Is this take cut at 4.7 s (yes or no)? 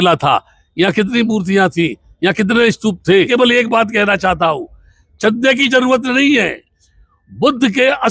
no